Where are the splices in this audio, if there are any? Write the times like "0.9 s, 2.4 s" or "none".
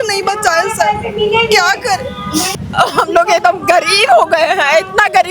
2.4 s